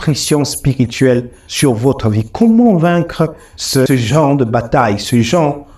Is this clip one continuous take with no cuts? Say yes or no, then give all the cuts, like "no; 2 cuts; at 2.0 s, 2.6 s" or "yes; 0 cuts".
no; 1 cut; at 3.9 s